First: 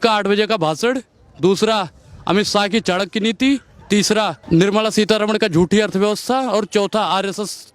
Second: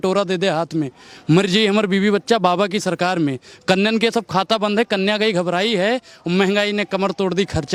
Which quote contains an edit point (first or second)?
first